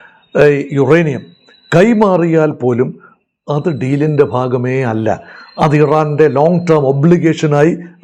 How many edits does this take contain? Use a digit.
0